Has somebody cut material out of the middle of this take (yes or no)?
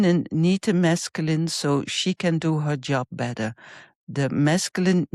no